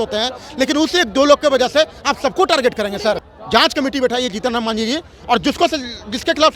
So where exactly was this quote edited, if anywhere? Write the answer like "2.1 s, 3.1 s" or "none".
none